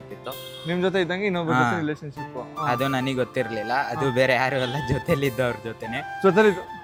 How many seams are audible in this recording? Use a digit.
0